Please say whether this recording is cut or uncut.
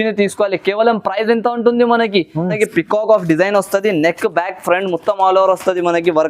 cut